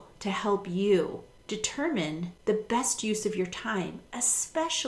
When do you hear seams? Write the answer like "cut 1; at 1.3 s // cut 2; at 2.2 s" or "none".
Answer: cut 1; at 1.3 s // cut 2; at 2.3 s